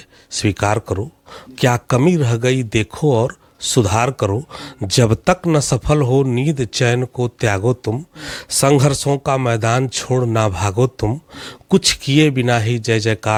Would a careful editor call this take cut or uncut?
uncut